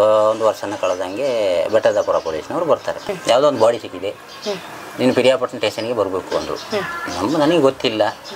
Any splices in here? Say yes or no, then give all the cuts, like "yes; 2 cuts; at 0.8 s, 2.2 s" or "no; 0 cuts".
yes; 1 cut; at 3.1 s